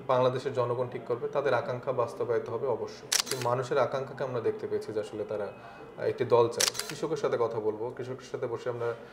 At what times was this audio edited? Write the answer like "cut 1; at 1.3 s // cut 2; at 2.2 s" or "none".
cut 1; at 3.3 s // cut 2; at 6.7 s